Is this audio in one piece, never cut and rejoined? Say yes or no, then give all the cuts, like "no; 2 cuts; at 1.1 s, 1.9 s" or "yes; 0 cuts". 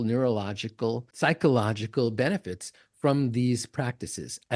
no; 1 cut; at 1.1 s